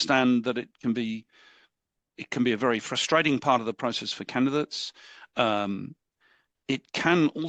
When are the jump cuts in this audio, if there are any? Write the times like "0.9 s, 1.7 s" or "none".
none

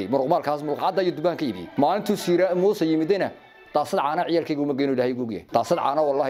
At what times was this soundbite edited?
1.6 s, 5.4 s

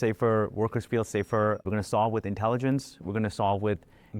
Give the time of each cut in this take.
1.7 s

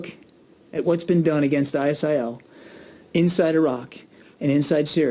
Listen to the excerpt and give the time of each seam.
none

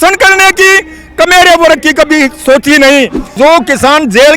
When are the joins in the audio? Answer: 3.3 s

